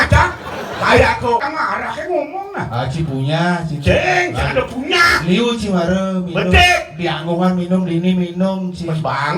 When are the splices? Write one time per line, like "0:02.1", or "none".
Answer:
0:01.4